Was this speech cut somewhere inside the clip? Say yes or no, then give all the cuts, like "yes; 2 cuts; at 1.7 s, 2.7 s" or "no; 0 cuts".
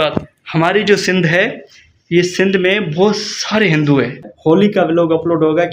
yes; 1 cut; at 4.3 s